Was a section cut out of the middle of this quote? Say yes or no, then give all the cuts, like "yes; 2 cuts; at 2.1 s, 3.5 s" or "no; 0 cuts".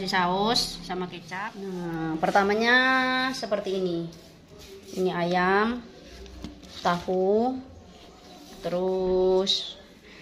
yes; 1 cut; at 1.2 s